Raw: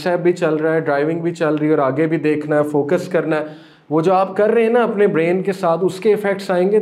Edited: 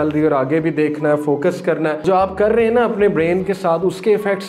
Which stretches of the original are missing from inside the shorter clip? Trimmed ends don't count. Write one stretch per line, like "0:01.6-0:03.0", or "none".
0:03.5-0:04.0